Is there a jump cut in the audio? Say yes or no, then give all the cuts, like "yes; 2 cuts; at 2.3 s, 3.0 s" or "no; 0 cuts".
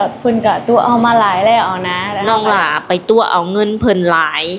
yes; 1 cut; at 2.1 s